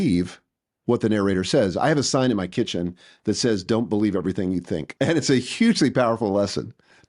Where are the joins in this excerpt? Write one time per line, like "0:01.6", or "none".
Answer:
0:04.9